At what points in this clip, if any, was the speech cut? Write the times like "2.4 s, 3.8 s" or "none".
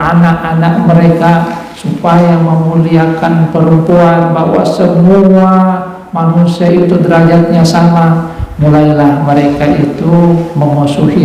none